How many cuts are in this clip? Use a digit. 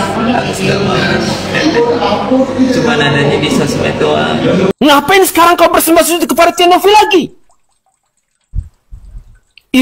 1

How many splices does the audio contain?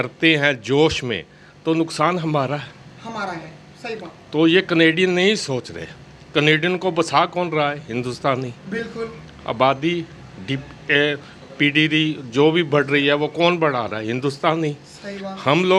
0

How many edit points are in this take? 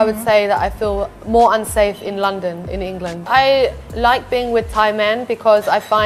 1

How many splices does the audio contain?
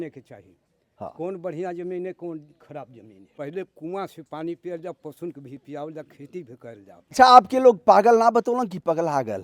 2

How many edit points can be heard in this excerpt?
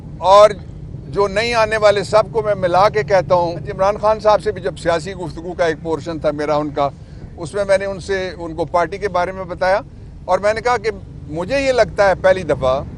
1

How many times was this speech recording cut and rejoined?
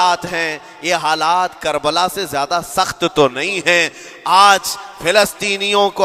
0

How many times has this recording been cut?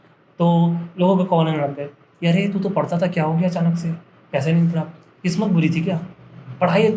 0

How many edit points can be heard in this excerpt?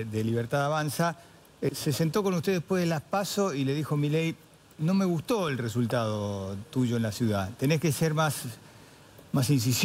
1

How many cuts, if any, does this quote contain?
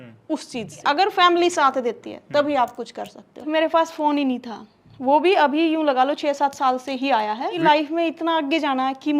3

